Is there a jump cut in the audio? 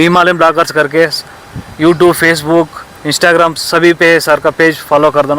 no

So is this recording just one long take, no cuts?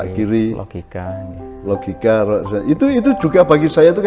yes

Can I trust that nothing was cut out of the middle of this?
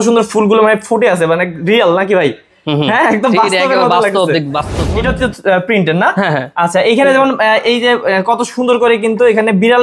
no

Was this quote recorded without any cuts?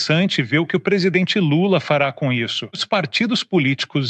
no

